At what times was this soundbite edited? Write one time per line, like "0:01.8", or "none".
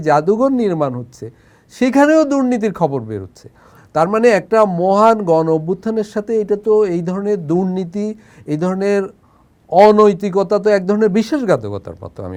none